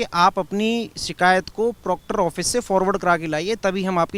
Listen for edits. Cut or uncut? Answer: uncut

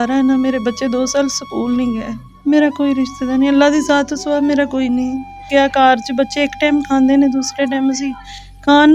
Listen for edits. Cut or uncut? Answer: cut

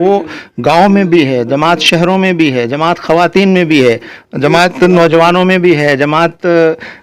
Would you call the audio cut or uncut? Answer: uncut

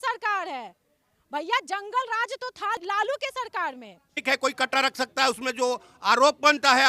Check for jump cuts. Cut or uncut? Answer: cut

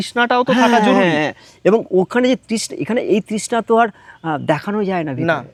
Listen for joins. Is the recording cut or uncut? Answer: uncut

